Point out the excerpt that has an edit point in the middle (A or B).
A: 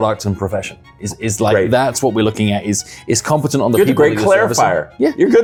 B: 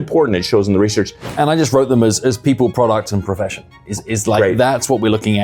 B